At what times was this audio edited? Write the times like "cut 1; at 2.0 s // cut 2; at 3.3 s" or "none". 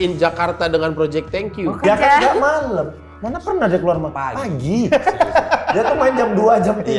cut 1; at 1.8 s

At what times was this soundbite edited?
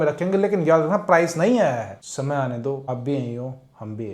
cut 1; at 1.9 s // cut 2; at 2.9 s

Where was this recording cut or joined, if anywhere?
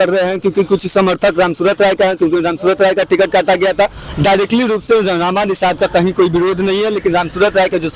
none

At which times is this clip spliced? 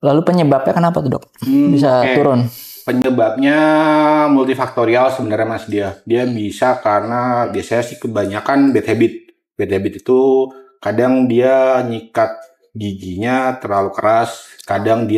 none

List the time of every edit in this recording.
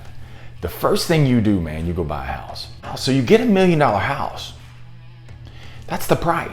cut 1; at 2.9 s

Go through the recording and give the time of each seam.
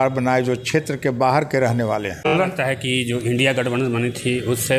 cut 1; at 2.3 s

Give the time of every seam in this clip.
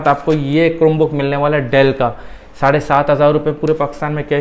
none

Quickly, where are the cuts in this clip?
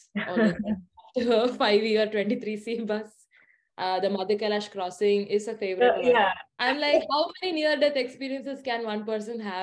cut 1; at 6.5 s

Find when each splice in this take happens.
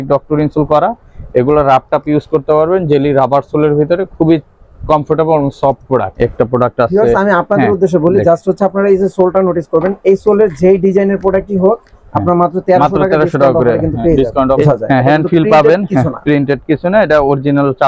cut 1; at 6.2 s // cut 2; at 14.6 s

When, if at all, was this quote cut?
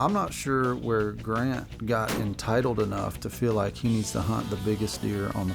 cut 1; at 1.7 s

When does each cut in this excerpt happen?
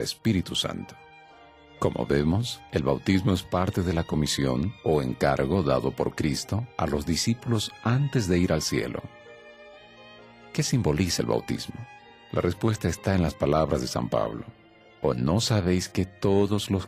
cut 1; at 6.2 s

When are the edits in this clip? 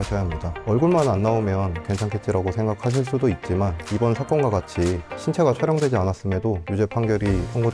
none

